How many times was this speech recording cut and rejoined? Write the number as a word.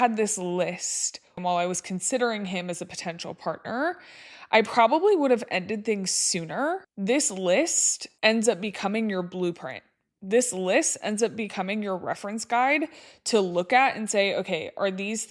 two